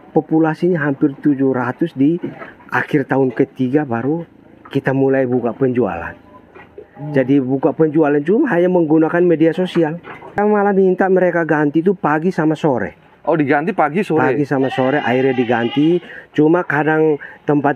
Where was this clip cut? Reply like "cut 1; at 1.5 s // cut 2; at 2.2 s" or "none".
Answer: cut 1; at 10.4 s

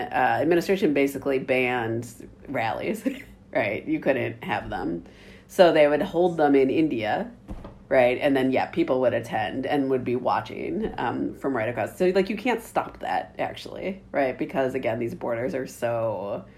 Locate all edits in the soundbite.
none

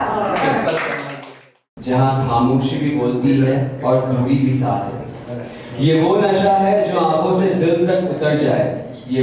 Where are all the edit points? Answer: cut 1; at 1.4 s

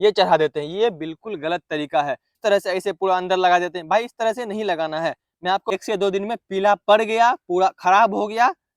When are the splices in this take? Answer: cut 1; at 2.3 s // cut 2; at 5.7 s

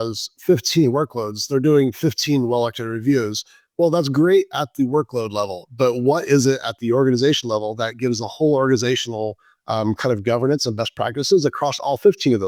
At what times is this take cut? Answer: none

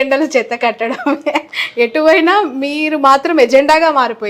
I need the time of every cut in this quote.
none

